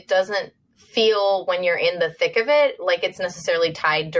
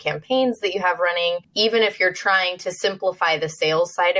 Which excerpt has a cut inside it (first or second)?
second